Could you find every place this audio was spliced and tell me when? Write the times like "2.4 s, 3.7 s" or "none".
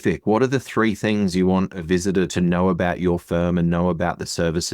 2.3 s